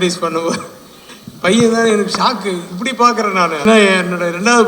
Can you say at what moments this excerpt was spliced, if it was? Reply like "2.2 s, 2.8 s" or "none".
3.6 s